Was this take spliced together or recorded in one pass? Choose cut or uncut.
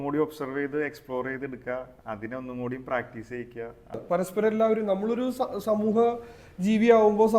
cut